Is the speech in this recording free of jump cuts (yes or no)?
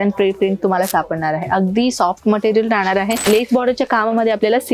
no